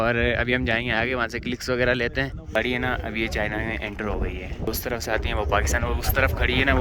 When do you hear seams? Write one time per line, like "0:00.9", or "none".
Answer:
0:02.5
0:04.7